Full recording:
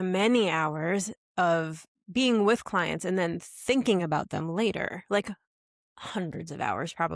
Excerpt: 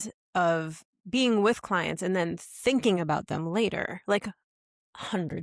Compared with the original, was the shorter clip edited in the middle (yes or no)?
no